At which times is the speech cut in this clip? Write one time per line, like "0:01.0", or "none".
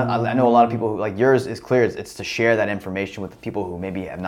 none